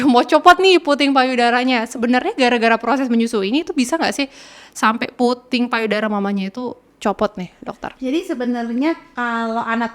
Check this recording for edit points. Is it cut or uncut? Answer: uncut